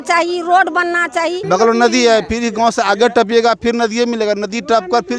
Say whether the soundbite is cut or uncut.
cut